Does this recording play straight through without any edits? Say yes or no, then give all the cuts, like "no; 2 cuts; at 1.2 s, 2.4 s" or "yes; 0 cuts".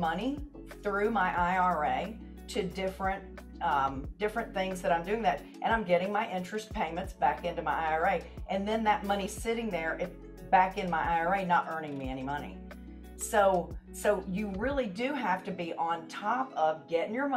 yes; 0 cuts